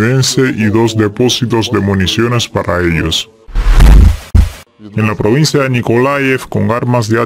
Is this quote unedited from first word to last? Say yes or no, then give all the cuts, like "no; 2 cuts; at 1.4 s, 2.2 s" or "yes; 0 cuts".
no; 1 cut; at 4.7 s